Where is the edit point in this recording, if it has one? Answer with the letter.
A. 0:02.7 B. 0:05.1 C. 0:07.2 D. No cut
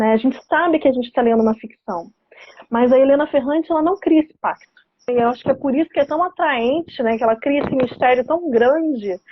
B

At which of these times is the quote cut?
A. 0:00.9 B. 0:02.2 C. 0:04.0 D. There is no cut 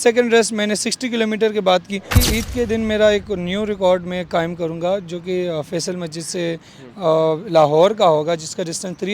B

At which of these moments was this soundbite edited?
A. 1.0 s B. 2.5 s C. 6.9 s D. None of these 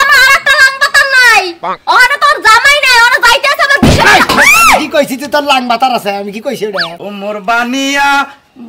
C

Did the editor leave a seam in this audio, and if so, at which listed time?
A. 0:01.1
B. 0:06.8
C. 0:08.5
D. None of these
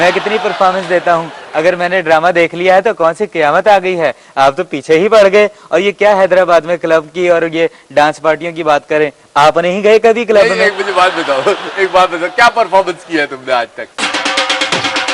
D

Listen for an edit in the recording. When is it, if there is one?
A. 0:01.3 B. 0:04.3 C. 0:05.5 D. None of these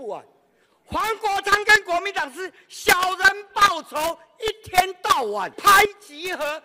C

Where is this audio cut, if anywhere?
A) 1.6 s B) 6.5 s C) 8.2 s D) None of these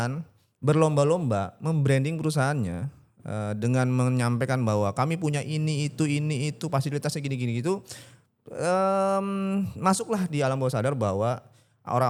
D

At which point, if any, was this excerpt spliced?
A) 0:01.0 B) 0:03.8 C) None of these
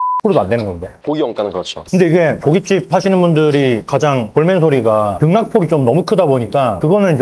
C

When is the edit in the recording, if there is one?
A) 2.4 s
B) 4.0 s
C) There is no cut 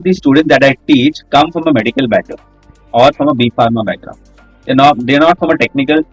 C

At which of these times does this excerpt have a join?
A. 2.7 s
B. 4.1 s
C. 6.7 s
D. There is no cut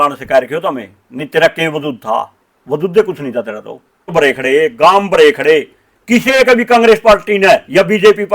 B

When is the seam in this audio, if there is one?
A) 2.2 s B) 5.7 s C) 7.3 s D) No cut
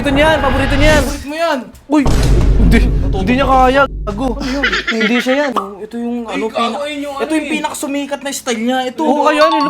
B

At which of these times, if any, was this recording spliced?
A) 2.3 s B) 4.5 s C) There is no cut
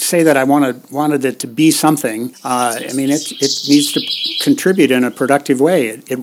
A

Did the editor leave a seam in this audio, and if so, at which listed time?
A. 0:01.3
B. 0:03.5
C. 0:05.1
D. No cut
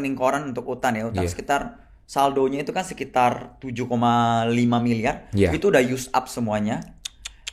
D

